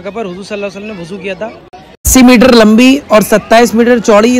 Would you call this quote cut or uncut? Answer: cut